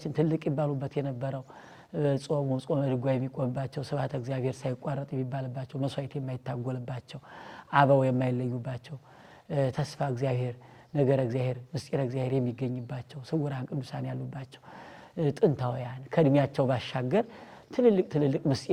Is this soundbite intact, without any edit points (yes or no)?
yes